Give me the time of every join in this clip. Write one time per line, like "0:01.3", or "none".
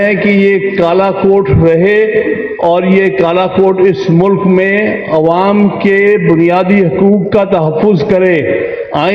none